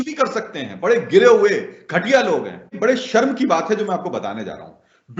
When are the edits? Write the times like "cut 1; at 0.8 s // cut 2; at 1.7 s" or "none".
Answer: cut 1; at 2.7 s